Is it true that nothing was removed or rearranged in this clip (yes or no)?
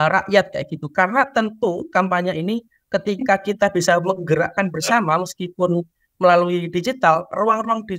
yes